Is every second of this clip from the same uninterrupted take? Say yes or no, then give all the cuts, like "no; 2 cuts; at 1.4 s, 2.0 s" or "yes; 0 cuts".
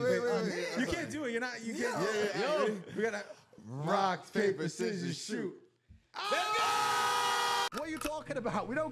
no; 1 cut; at 7.7 s